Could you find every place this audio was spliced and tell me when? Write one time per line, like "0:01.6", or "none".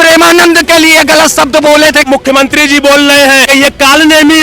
0:02.1
0:03.4